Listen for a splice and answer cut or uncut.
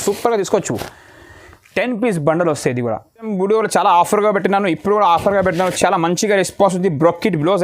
cut